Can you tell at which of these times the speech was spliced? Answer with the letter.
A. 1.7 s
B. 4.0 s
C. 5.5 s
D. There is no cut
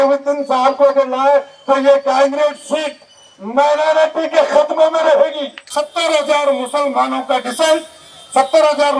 C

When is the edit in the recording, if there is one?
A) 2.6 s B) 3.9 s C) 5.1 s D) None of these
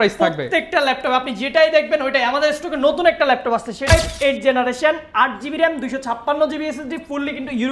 B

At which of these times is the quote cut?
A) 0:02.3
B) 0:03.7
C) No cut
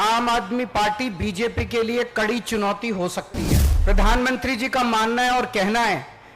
B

